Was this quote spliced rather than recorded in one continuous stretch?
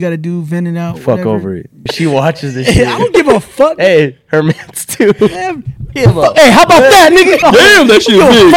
yes; 2 cuts; at 1.9 s, 7.4 s

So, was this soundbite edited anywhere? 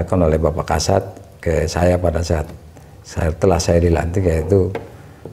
no; 0 cuts

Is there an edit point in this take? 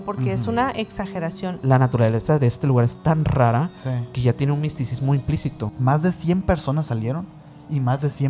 yes; 2 cuts; at 1.6 s, 5.7 s

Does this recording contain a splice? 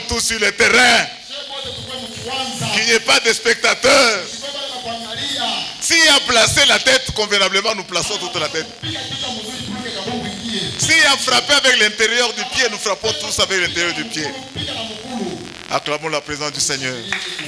no; 0 cuts

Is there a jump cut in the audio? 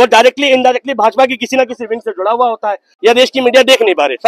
yes; 1 cut; at 2.9 s

